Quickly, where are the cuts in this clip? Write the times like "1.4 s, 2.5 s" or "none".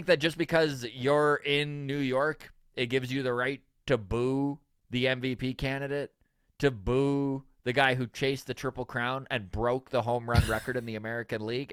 none